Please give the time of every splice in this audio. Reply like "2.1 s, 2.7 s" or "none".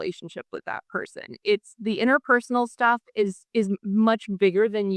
none